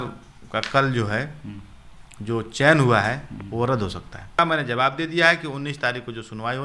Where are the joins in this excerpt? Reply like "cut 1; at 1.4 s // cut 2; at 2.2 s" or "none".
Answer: cut 1; at 4.4 s